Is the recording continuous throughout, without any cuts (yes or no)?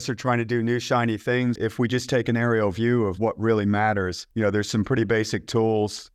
no